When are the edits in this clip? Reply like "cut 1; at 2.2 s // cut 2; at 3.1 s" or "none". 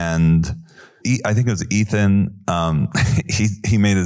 cut 1; at 1.0 s